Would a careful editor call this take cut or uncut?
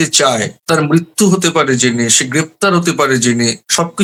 uncut